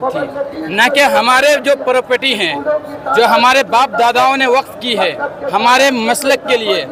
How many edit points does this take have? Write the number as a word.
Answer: zero